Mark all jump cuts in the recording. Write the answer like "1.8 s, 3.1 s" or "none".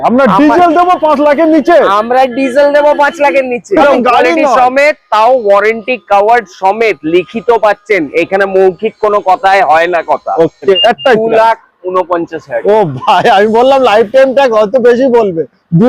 3.8 s, 10.8 s